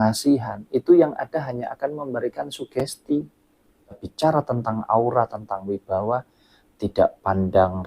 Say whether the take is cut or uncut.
cut